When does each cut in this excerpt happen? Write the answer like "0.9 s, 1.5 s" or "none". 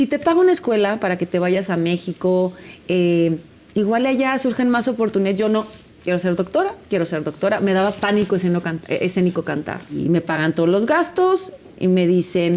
10.0 s

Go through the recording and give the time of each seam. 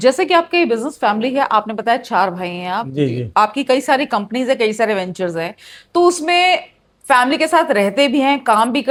none

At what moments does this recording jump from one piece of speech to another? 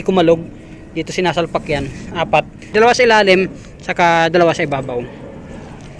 2.7 s

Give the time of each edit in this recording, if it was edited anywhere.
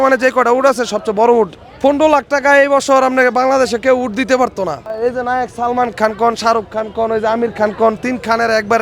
1.6 s, 5.0 s

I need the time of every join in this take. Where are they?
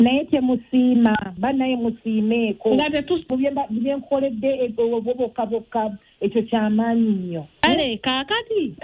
3.2 s

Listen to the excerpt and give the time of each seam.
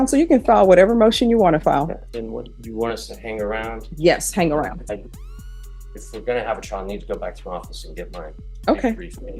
2.0 s

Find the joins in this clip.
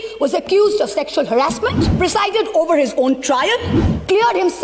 1.8 s

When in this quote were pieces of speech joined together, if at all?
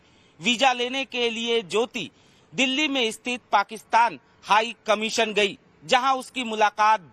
2.6 s

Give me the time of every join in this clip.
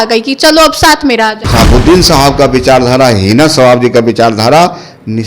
1.4 s

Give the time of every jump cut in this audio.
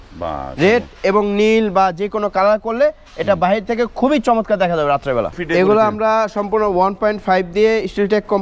5.4 s

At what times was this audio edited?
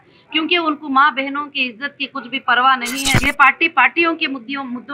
3.1 s

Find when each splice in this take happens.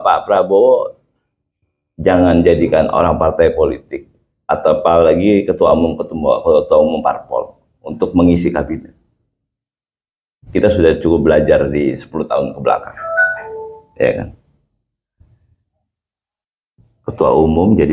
none

